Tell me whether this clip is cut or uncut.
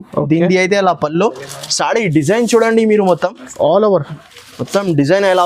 uncut